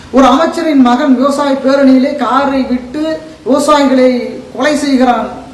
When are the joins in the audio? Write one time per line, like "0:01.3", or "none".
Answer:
none